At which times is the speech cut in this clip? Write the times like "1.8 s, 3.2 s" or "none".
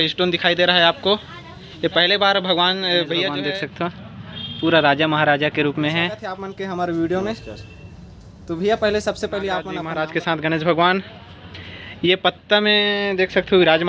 3.3 s, 6.5 s, 9.8 s